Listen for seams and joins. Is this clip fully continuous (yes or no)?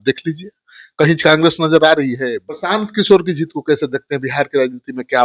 no